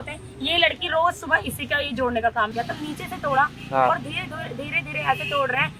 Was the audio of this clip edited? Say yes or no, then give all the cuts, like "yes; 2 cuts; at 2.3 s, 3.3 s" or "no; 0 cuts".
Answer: yes; 1 cut; at 2.5 s